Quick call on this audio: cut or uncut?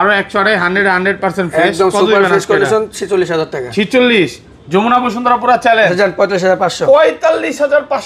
uncut